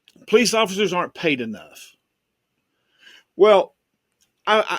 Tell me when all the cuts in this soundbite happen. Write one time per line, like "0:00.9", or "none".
none